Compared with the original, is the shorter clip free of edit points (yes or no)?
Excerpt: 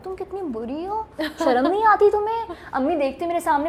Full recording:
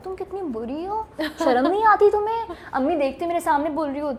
yes